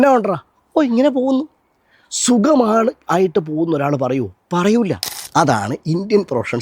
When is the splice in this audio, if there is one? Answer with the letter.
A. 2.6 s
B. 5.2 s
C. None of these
B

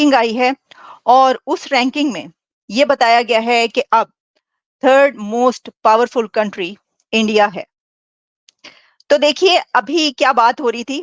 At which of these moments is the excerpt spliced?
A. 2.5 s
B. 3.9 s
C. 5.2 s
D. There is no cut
D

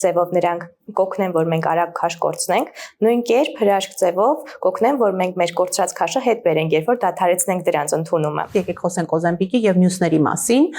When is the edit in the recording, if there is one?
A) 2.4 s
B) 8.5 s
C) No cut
B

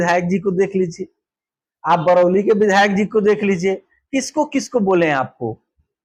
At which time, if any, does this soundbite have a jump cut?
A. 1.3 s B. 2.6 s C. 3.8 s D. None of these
D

